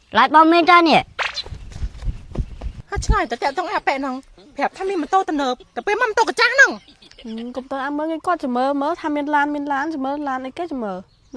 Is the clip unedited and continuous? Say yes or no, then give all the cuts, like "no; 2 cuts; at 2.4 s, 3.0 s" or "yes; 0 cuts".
yes; 0 cuts